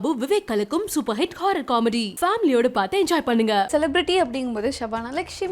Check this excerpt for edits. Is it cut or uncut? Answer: cut